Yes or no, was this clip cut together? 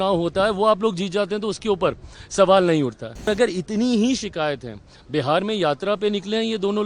yes